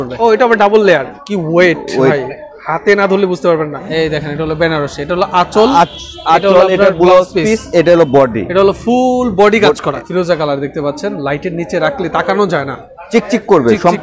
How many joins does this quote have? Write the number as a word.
three